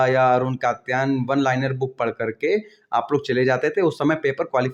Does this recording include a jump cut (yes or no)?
no